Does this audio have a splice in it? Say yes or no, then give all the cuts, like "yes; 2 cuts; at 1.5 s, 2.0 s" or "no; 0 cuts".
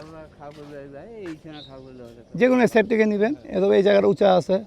no; 0 cuts